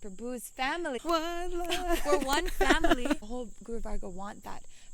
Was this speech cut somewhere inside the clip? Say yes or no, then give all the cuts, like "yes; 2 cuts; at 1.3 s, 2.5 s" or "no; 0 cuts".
yes; 2 cuts; at 1.0 s, 3.2 s